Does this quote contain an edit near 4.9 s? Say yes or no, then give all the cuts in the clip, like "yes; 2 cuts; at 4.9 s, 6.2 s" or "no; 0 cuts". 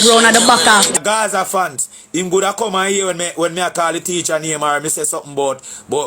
no; 1 cut; at 0.9 s